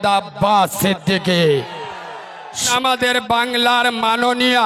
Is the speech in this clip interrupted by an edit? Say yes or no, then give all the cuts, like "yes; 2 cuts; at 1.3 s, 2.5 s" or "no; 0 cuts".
yes; 1 cut; at 2.7 s